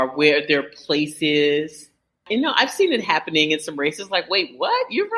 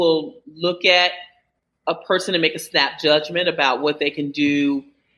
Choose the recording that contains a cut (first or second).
first